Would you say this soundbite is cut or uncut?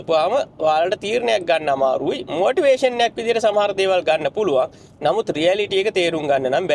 uncut